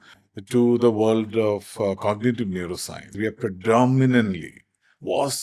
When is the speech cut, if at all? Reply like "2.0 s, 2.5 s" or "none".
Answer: 3.2 s